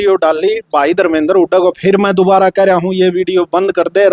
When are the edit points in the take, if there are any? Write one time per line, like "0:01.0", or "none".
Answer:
none